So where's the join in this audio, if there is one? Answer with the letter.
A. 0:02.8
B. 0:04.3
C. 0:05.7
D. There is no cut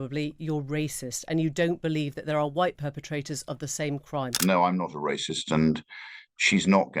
B